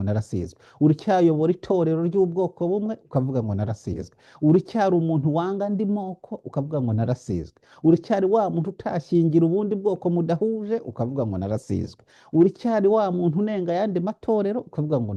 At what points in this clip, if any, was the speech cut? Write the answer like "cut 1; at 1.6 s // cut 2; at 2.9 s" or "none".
none